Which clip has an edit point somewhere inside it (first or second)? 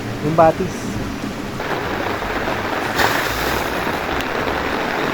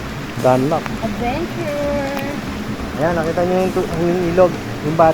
first